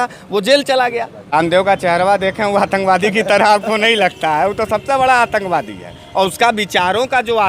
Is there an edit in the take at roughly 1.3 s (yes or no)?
yes